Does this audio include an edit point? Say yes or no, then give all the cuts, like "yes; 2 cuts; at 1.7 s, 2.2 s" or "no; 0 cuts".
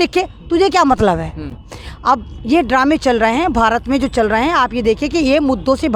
no; 0 cuts